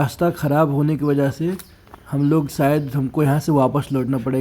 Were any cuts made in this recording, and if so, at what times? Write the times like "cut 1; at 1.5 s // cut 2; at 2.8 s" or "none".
none